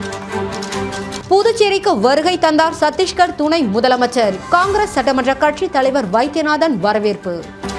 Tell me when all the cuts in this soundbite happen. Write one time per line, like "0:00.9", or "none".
0:00.9